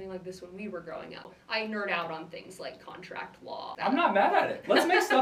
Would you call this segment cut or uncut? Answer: cut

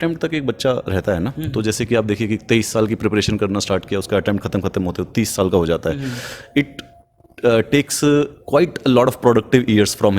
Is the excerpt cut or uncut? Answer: uncut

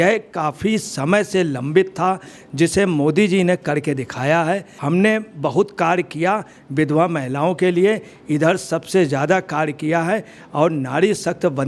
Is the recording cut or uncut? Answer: uncut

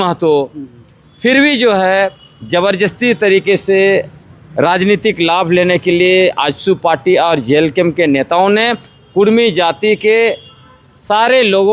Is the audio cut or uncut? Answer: uncut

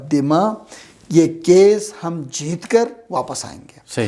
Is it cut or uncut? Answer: uncut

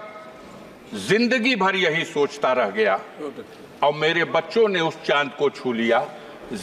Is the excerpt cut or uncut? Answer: uncut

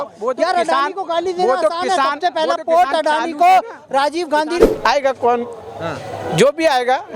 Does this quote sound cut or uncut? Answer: cut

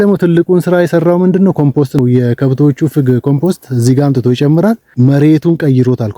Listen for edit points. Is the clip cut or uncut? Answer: cut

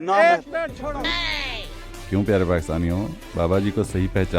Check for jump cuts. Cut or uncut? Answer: cut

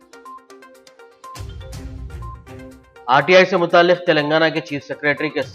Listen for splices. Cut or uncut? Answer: cut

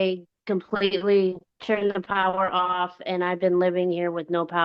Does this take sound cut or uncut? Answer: cut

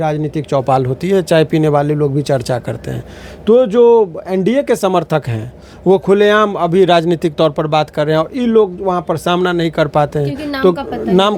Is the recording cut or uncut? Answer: uncut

